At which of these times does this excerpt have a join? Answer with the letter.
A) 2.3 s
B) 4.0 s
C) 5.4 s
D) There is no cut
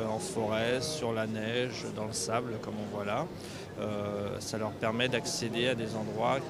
A